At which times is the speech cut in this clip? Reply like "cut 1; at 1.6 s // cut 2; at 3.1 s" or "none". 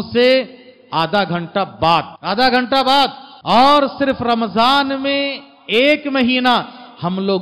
cut 1; at 2.1 s // cut 2; at 3.3 s